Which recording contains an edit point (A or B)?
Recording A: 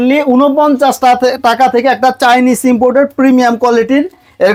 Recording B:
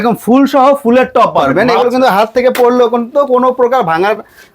B